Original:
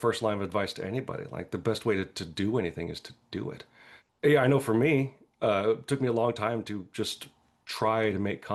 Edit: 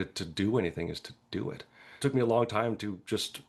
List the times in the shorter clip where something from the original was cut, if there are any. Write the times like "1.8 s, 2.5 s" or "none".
2.0 s